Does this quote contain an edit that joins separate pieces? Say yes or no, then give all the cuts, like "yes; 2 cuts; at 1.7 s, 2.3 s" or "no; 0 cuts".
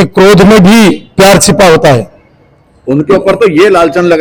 no; 0 cuts